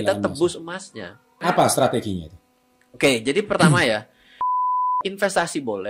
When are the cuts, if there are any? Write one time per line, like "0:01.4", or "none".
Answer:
0:01.4
0:04.7